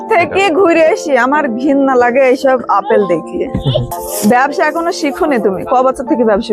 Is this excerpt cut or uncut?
cut